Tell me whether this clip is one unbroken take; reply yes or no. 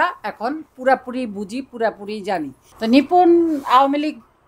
no